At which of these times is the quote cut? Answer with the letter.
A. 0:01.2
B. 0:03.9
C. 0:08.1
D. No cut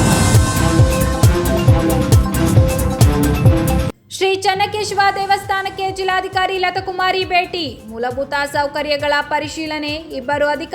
B